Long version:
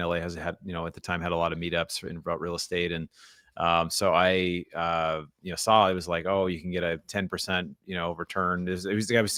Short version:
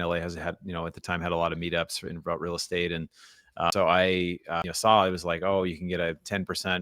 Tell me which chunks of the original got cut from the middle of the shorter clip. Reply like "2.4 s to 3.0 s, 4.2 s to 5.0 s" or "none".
3.7 s to 4.0 s, 4.8 s to 5.4 s